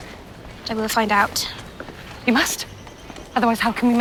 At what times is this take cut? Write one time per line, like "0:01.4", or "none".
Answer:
none